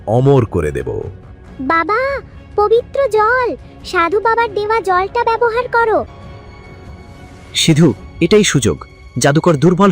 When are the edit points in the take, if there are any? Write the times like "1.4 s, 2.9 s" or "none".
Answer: 6.1 s